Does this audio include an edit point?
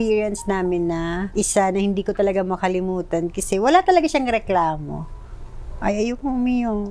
no; 0 cuts

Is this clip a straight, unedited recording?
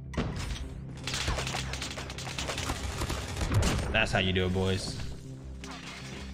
yes; 0 cuts

